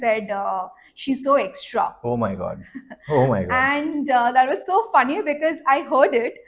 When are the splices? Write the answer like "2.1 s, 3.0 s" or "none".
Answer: none